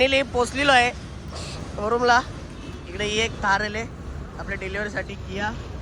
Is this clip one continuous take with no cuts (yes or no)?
yes